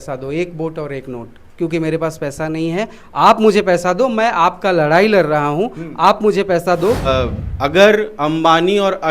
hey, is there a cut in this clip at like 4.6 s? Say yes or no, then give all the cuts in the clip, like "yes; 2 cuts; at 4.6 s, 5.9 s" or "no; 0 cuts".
no; 1 cut; at 7.1 s